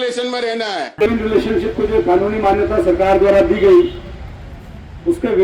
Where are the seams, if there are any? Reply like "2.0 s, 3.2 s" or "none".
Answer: 0.9 s